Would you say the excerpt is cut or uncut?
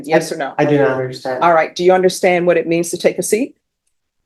uncut